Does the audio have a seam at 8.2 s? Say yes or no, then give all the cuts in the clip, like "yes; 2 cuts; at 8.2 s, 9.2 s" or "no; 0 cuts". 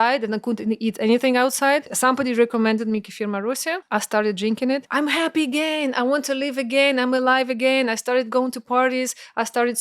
no; 3 cuts; at 1.9 s, 3.8 s, 4.9 s